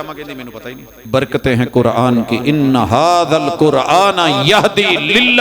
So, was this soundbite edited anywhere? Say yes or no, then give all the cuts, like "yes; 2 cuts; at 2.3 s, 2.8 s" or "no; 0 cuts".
yes; 1 cut; at 1.1 s